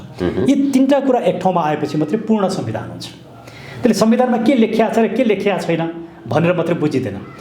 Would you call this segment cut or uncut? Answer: uncut